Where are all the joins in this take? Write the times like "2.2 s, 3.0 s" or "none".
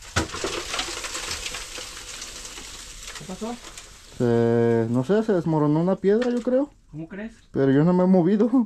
none

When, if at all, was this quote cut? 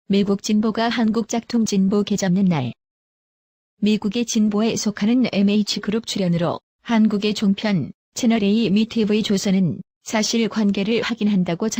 none

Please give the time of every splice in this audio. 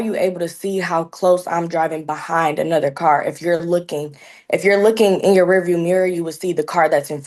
none

